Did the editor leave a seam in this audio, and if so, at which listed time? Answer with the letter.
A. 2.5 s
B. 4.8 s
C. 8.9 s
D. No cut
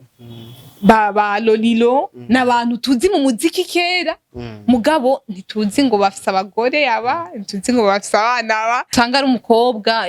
C